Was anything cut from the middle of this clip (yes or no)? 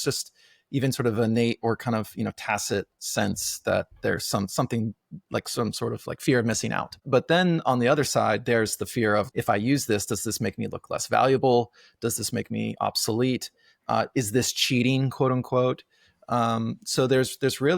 yes